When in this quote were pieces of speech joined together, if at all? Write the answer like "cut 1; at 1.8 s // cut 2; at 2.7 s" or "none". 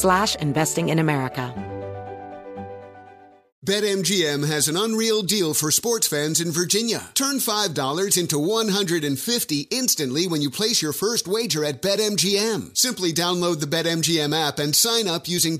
cut 1; at 1.5 s